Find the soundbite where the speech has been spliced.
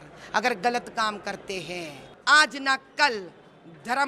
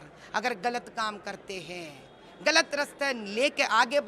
first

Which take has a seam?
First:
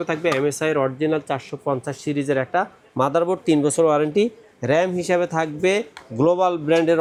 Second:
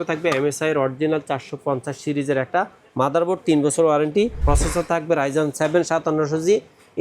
second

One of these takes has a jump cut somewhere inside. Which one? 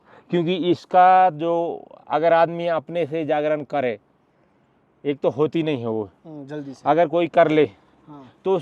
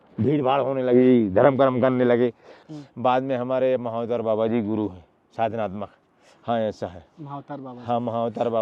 second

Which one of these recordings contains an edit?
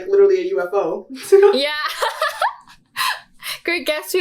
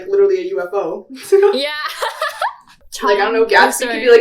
second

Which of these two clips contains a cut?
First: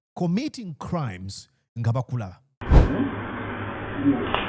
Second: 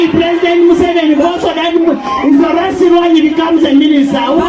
first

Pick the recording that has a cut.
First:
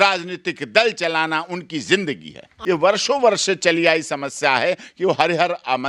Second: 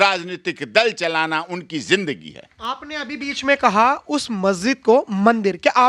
first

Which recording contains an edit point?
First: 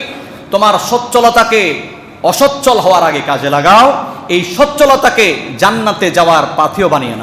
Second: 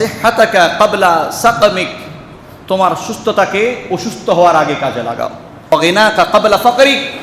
second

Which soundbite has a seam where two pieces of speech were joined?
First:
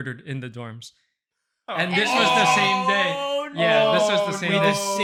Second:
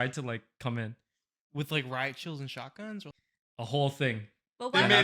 second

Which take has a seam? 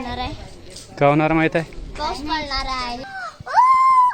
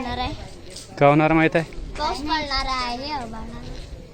first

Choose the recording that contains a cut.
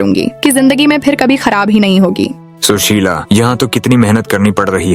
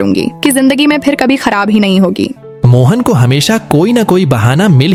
first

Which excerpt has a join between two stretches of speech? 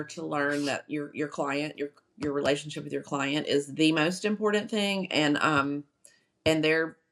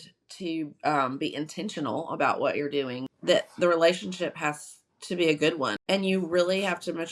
second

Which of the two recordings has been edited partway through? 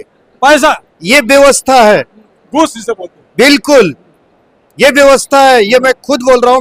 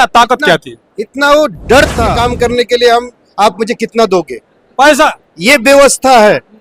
second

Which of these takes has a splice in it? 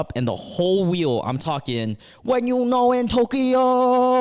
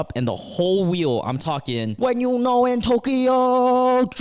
second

